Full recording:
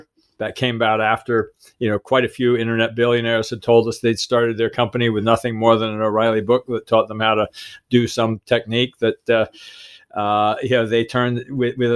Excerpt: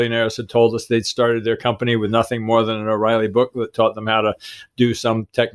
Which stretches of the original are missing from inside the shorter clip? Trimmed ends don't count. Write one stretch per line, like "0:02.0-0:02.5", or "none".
none

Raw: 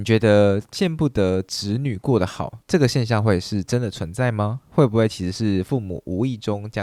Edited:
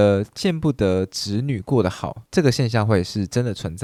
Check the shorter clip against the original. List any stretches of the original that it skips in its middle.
none

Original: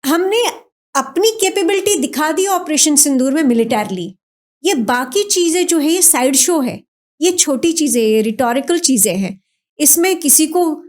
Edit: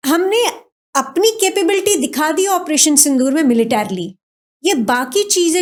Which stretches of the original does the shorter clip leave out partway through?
none

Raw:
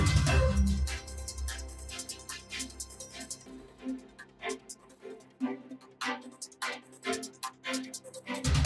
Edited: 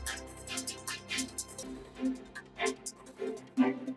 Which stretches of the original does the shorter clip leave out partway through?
0:03.0-0:03.4

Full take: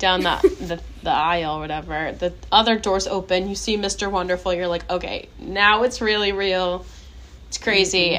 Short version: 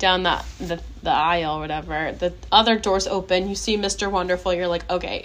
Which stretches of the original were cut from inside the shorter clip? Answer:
none

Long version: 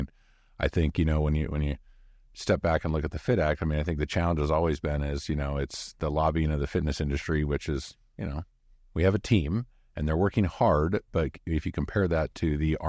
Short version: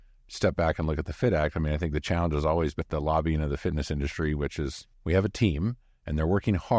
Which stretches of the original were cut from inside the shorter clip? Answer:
0:04.8-0:05.9
0:08.0-0:08.8

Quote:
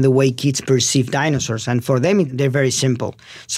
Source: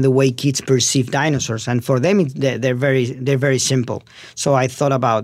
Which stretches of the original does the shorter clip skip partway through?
0:02.3-0:03.2

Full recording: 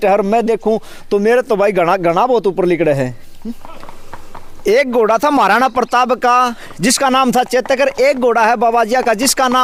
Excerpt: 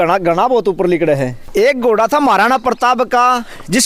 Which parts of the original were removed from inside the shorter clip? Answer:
0:03.2-0:04.5

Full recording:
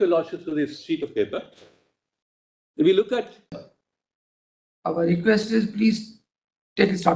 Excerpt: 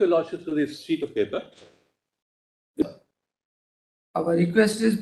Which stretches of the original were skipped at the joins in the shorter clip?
0:02.8-0:03.5

